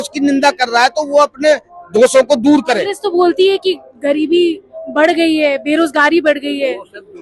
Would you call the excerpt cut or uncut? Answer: cut